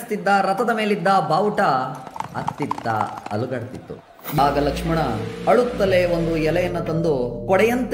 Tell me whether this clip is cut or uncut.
cut